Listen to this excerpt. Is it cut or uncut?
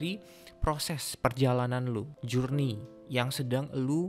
cut